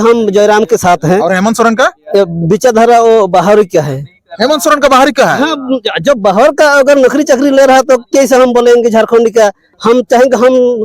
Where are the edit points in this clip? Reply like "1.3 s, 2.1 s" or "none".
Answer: 9.7 s